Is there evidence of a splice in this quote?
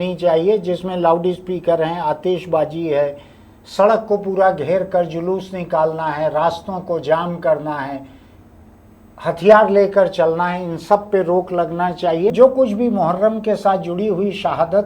yes; 1 cut; at 12.3 s

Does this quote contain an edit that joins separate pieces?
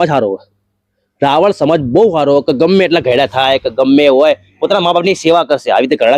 no; 0 cuts

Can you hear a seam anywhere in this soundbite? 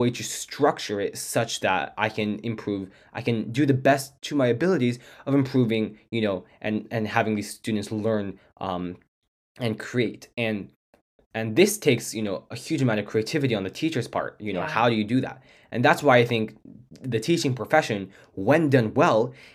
no; 0 cuts

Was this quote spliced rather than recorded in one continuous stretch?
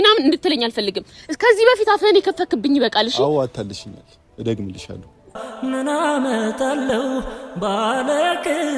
yes; 1 cut; at 5.4 s

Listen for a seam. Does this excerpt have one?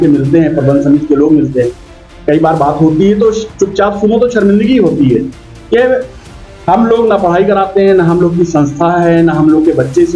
no; 0 cuts

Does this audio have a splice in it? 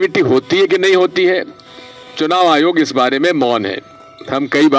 no; 0 cuts

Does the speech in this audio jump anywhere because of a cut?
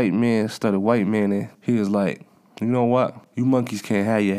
yes; 2 cuts; at 1.5 s, 3.2 s

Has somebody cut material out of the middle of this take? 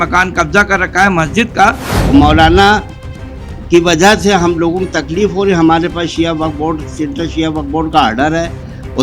yes; 1 cut; at 1.9 s

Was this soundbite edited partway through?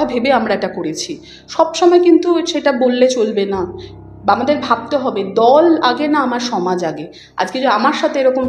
no; 0 cuts

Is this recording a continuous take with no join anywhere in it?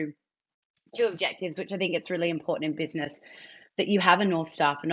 yes; 0 cuts

